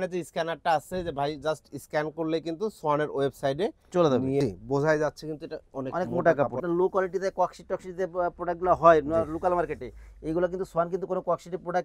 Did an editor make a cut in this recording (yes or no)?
yes